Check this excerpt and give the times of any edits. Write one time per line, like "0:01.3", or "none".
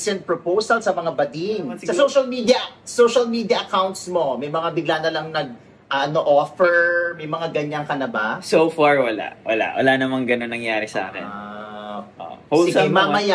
0:01.8